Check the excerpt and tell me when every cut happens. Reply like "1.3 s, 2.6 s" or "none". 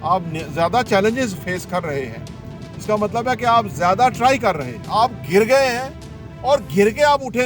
4.7 s